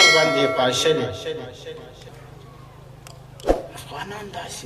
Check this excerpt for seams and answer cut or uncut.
cut